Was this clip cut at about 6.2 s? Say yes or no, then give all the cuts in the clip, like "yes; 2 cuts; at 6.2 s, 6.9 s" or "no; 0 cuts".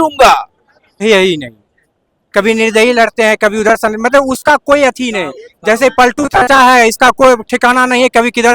no; 1 cut; at 0.9 s